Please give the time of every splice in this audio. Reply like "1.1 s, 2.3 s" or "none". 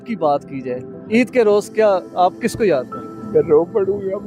none